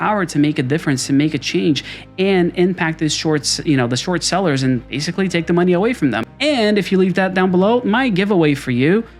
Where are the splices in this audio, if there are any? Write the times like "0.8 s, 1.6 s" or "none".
6.3 s

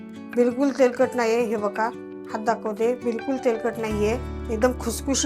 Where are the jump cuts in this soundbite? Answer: 4.3 s

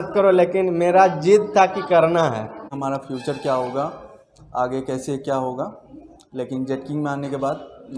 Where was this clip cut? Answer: 2.7 s

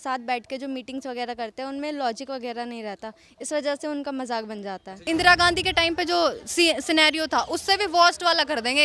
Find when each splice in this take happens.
4.9 s

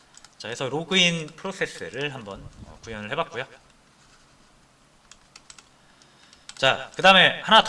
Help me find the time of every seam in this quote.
2.2 s

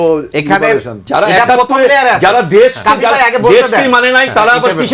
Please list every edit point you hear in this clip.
1.0 s

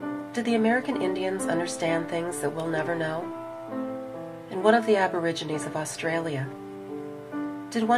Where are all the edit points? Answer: 6.1 s

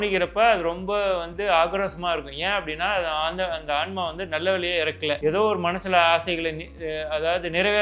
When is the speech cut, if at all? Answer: 5.2 s

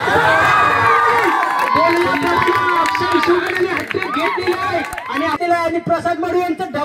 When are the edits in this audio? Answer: 5.4 s

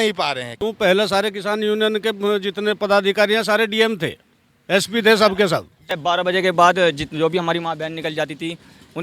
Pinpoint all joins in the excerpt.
5.9 s

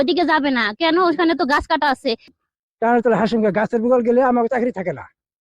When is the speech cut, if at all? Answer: 2.3 s

